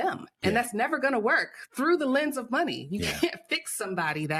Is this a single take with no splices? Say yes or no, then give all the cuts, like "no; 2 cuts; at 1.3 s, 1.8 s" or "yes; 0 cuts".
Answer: yes; 0 cuts